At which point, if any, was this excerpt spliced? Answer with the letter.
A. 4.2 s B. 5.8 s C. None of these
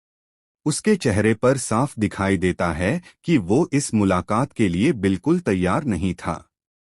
A